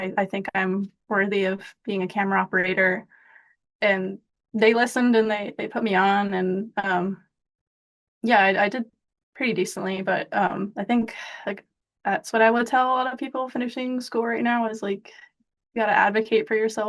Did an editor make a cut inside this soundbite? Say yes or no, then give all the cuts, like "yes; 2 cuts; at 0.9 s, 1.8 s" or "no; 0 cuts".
no; 0 cuts